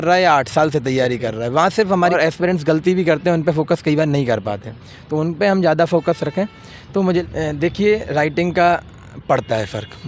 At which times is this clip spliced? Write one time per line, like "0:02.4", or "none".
0:02.1
0:07.2